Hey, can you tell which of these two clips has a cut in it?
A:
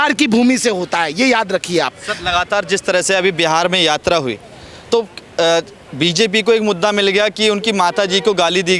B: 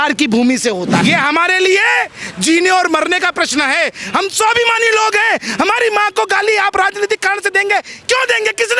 B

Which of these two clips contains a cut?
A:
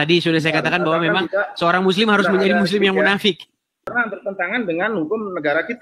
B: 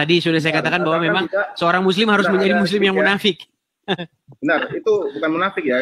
A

